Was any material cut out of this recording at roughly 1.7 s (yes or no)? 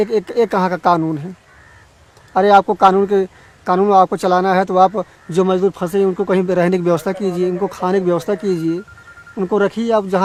no